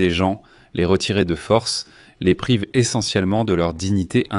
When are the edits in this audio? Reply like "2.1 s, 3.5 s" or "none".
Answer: none